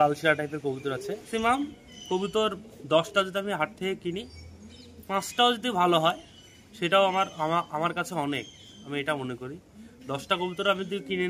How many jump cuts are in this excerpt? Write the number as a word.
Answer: one